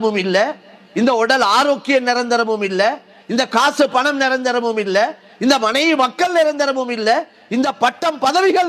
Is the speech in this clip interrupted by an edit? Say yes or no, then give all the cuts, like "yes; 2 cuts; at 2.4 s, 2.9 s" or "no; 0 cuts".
no; 0 cuts